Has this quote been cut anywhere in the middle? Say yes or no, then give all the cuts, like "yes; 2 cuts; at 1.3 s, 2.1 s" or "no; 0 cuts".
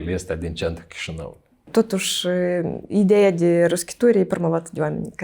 yes; 1 cut; at 1.7 s